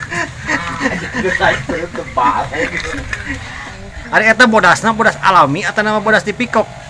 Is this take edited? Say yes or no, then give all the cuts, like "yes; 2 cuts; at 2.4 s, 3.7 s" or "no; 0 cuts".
yes; 1 cut; at 3.9 s